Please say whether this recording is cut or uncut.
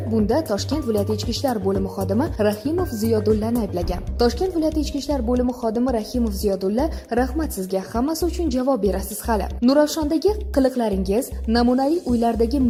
uncut